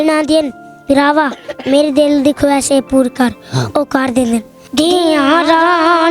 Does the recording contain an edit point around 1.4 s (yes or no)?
no